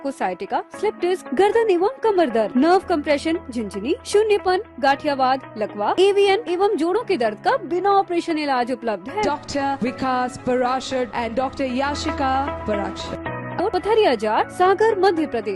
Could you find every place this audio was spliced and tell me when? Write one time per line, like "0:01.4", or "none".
0:13.6